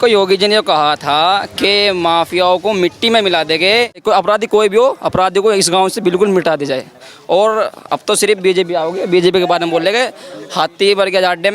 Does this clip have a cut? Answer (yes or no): yes